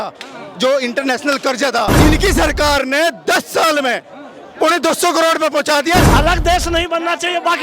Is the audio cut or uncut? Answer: cut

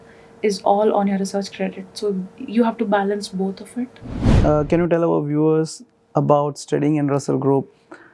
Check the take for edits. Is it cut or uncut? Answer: cut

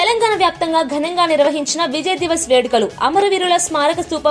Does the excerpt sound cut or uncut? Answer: uncut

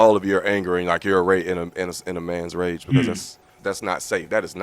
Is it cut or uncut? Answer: cut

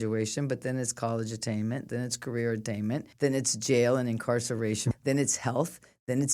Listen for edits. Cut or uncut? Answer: cut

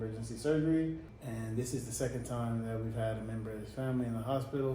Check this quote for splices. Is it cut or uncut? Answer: cut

